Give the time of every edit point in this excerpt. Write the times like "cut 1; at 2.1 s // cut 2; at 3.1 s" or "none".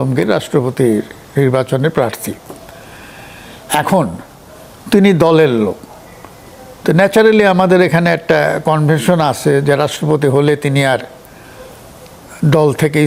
none